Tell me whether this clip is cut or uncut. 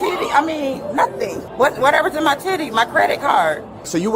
cut